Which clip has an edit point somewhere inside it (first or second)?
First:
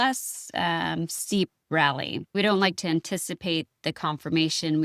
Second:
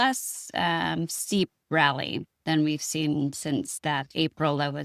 first